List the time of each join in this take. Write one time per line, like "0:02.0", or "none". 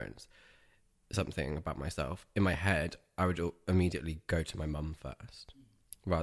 none